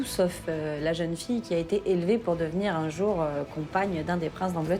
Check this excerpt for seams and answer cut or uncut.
uncut